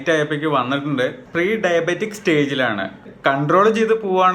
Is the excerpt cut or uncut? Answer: cut